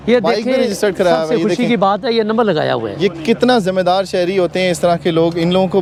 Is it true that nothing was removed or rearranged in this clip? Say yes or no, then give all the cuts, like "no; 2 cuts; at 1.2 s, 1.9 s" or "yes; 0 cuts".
yes; 0 cuts